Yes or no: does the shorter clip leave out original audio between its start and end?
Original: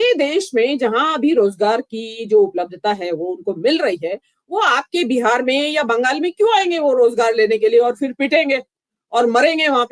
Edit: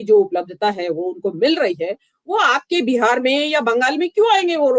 no